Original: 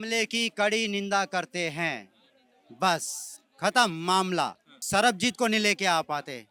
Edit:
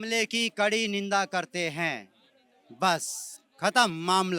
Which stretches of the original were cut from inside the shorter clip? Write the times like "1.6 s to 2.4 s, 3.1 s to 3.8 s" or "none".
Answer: none